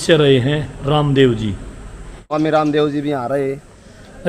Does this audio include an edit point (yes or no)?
yes